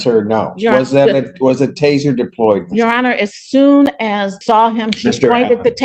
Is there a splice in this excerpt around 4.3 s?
yes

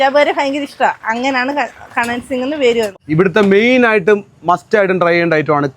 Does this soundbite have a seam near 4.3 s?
no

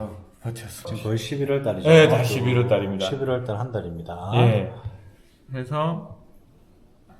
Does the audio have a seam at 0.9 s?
yes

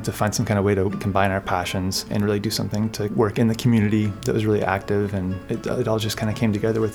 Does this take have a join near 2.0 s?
yes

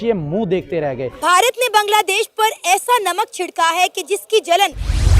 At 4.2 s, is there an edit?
no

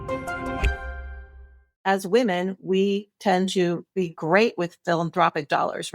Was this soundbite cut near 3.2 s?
no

